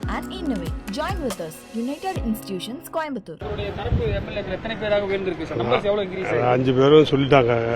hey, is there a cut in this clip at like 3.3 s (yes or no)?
yes